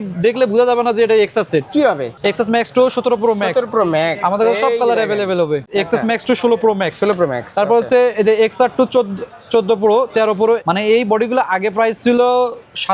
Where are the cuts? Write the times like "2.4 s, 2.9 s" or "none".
2.1 s, 5.7 s, 10.6 s